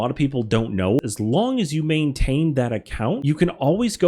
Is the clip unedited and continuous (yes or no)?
no